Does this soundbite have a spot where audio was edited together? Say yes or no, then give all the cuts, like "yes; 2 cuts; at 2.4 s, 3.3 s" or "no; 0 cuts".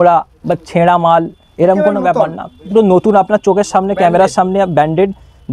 no; 0 cuts